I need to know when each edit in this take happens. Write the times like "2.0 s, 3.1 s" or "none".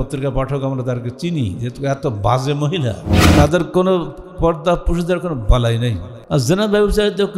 3.1 s, 6.1 s